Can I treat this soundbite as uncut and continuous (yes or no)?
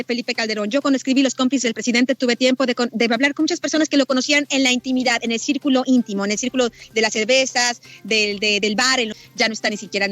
no